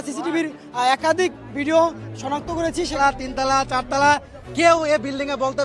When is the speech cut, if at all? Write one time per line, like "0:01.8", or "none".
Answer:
0:03.0